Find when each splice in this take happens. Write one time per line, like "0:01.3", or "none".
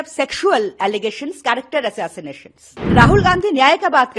0:02.7